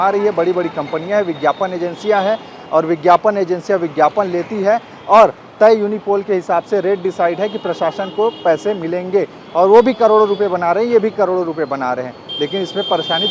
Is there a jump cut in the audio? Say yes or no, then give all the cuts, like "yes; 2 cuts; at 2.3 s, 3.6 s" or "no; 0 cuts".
no; 0 cuts